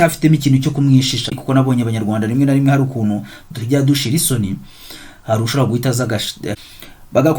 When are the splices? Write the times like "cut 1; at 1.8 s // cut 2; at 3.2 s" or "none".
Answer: cut 1; at 1.4 s // cut 2; at 6.6 s